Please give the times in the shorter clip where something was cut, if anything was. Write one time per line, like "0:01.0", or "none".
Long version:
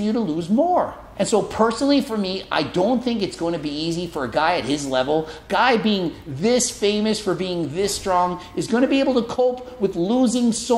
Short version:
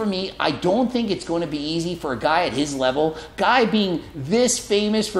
none